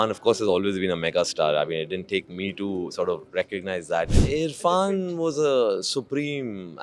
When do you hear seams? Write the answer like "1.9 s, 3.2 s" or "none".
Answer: 4.2 s